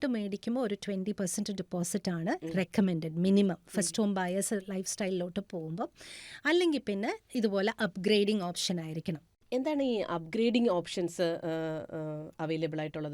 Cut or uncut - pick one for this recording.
uncut